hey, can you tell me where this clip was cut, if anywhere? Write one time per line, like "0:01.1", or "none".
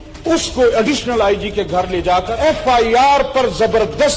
0:02.3